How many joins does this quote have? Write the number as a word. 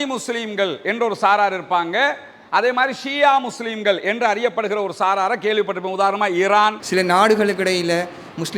one